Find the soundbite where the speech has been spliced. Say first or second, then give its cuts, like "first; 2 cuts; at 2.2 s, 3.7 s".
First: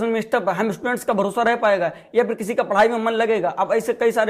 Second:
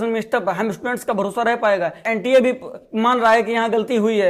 second; 1 cut; at 2.0 s